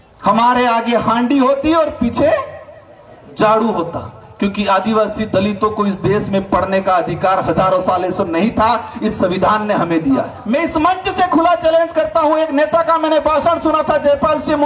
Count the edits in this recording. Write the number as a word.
one